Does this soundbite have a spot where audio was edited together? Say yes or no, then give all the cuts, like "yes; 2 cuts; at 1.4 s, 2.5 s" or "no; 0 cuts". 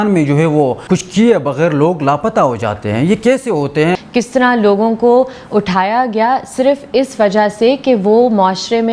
yes; 1 cut; at 3.9 s